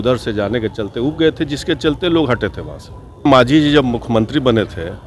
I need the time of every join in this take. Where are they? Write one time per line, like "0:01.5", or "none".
0:03.2